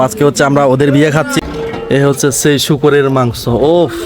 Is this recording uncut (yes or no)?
no